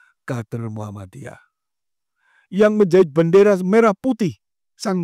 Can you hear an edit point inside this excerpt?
no; 0 cuts

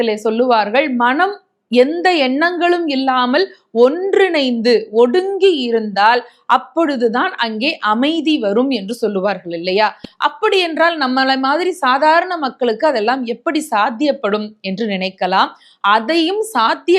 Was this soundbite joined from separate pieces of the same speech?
no; 0 cuts

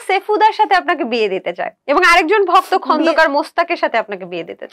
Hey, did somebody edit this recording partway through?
no; 0 cuts

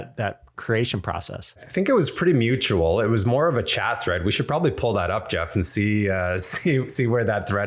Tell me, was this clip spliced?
yes; 1 cut; at 1.6 s

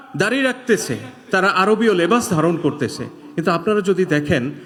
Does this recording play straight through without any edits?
yes; 0 cuts

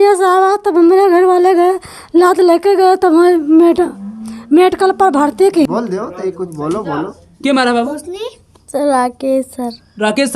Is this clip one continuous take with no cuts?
no; 1 cut; at 5.7 s

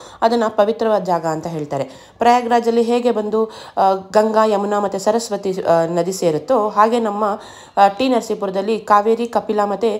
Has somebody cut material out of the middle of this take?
no; 0 cuts

